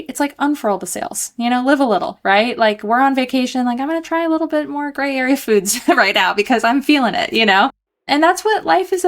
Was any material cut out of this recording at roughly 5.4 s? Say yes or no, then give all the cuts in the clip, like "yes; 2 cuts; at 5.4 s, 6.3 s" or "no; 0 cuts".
no; 1 cut; at 8.0 s